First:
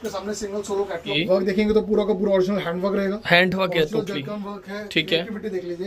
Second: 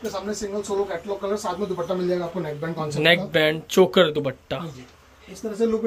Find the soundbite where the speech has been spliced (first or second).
first